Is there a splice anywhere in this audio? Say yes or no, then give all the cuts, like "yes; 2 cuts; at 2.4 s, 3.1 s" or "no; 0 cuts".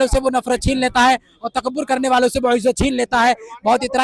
no; 0 cuts